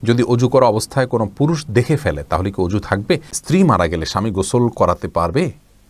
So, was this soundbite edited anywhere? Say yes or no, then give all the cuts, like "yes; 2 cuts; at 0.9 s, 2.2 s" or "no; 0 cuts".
yes; 1 cut; at 3.4 s